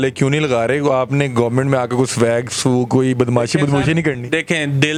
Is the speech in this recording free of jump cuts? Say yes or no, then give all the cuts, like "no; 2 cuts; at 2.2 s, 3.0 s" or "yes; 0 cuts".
yes; 0 cuts